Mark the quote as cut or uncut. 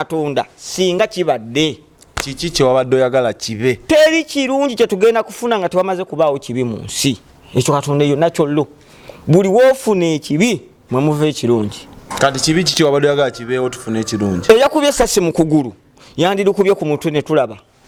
uncut